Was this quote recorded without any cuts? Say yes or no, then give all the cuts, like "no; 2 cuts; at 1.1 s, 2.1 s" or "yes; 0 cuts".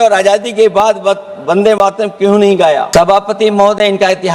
no; 1 cut; at 2.9 s